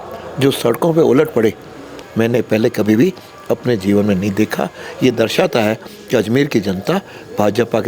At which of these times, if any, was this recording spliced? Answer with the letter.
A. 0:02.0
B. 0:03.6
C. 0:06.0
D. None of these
A